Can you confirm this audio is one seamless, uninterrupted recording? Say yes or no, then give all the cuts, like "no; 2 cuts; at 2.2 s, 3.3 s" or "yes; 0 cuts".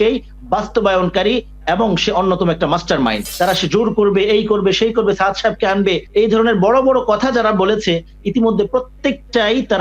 no; 1 cut; at 3.3 s